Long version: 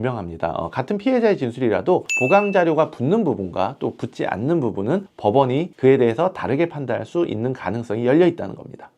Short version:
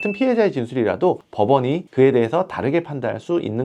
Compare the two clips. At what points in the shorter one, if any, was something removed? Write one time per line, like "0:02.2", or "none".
0:01.3